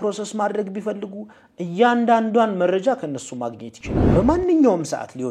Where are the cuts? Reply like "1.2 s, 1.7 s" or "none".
4.1 s